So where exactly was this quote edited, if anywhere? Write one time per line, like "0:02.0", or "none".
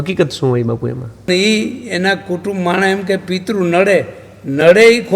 0:01.3